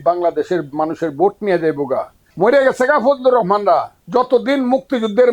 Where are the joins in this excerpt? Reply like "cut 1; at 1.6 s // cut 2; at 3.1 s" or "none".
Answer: cut 1; at 2.2 s // cut 2; at 4.0 s